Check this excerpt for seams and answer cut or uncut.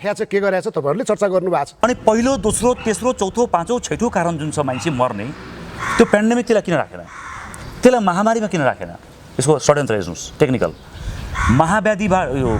cut